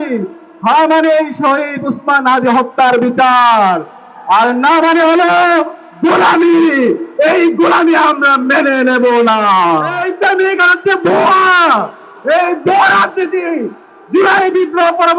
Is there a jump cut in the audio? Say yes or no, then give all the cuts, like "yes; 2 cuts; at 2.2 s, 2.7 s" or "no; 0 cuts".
yes; 1 cut; at 9.9 s